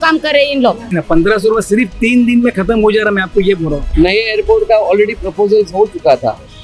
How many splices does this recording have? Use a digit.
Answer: 2